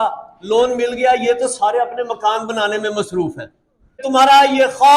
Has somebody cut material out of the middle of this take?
yes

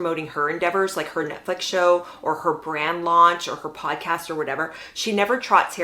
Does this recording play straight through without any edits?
yes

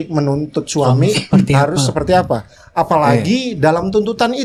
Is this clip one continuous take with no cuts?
yes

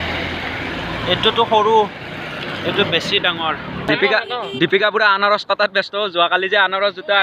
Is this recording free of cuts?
no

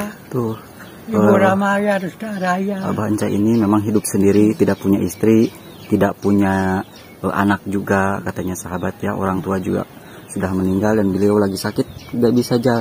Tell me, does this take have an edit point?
no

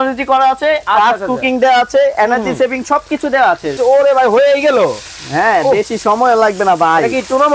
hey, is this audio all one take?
no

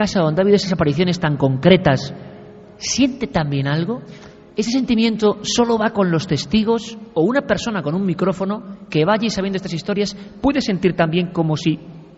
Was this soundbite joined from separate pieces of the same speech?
no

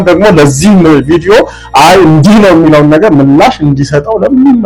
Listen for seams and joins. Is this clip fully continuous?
yes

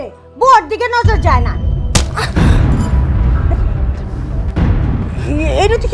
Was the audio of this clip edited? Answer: no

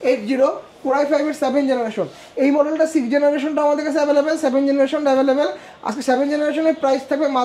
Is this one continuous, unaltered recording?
yes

